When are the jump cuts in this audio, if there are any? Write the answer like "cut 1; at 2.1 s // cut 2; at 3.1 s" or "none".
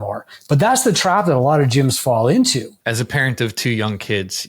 cut 1; at 2.7 s